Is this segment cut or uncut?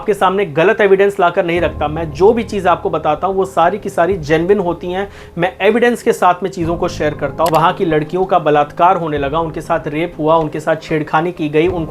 cut